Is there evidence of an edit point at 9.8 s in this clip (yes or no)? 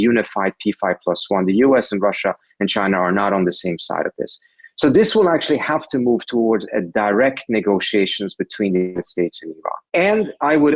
yes